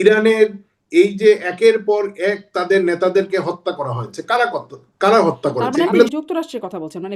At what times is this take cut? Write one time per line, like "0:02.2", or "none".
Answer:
0:06.1